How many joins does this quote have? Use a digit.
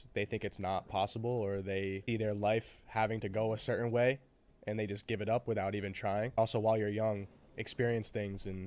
2